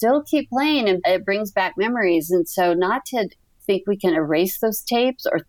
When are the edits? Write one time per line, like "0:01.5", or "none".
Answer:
0:01.0
0:03.6